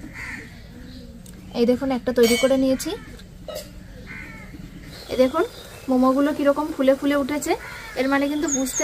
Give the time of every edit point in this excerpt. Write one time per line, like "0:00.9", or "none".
0:04.9